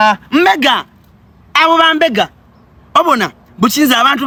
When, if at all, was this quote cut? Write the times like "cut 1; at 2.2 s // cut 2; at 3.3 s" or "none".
none